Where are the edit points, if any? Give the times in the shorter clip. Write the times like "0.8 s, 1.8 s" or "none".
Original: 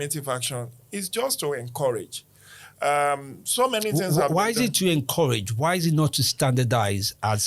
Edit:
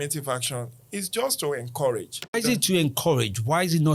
2.4 s